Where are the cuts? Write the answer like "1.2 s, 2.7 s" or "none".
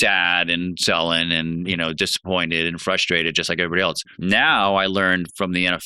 4.1 s